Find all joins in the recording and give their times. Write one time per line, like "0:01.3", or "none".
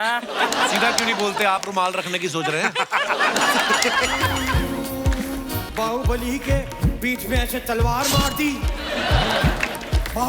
0:04.3